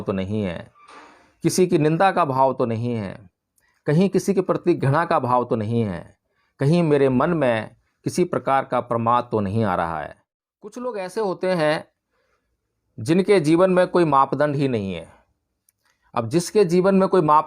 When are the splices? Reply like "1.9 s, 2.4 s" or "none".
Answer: 10.8 s